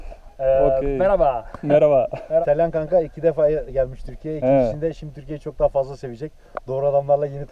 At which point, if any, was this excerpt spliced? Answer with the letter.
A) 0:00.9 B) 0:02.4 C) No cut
B